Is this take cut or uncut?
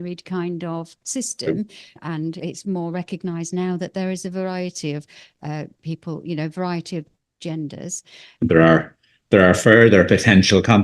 cut